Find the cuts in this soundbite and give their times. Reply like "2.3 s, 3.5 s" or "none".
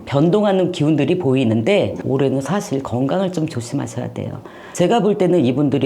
2.0 s, 4.6 s